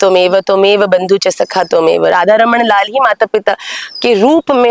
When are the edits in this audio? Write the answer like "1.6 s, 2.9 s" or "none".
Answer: none